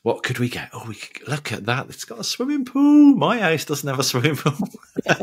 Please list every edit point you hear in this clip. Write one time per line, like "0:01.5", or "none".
none